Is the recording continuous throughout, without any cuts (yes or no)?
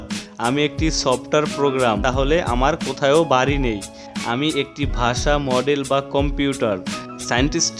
yes